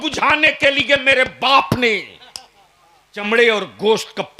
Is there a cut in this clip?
yes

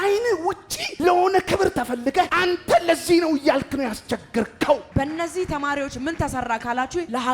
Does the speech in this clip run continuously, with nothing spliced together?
no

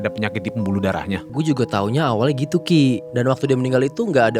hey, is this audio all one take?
no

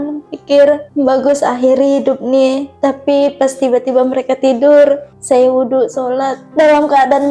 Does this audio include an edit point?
yes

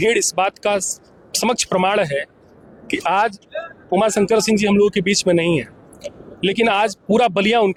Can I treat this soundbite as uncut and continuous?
yes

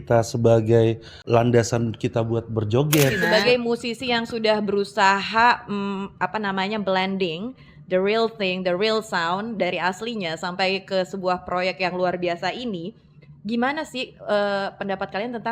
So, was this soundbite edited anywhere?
yes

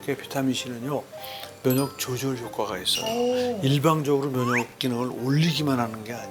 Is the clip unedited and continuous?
yes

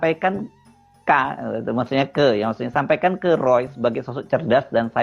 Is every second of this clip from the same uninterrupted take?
yes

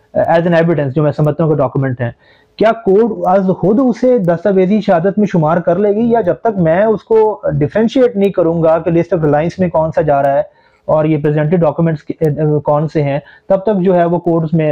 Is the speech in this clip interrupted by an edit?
no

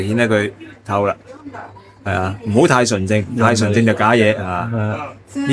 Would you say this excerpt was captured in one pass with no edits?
yes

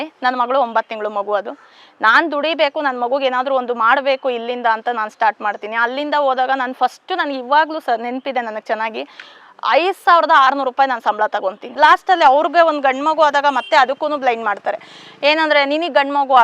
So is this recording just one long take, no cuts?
no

